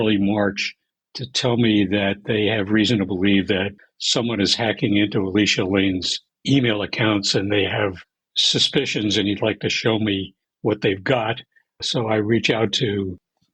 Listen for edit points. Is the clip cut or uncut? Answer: uncut